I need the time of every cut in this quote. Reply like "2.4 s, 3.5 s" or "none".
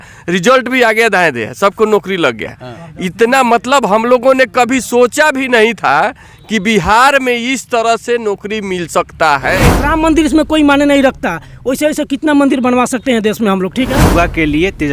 9.6 s, 14.0 s

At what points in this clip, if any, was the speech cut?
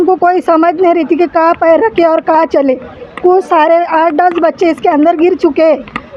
none

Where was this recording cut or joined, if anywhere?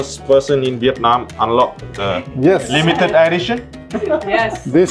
none

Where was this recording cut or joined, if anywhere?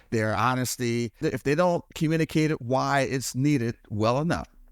1.2 s

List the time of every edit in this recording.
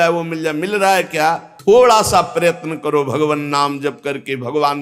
1.5 s

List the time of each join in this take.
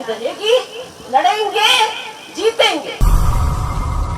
3.0 s

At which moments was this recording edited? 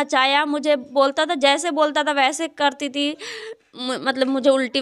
3.6 s

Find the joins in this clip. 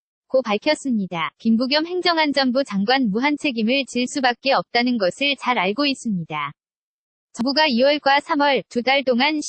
7.4 s

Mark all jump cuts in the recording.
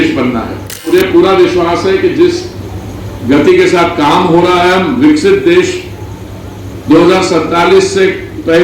0.9 s

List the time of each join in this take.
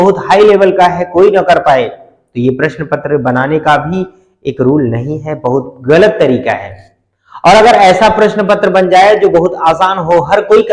none

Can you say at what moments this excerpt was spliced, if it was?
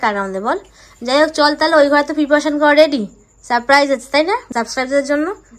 none

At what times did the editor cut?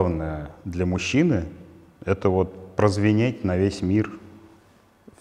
none

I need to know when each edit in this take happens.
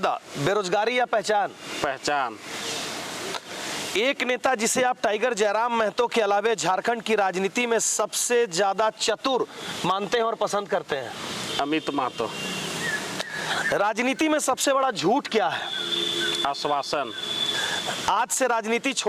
none

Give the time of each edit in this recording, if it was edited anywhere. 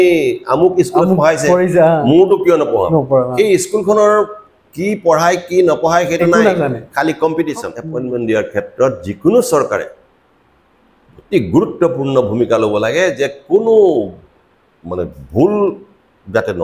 7.8 s

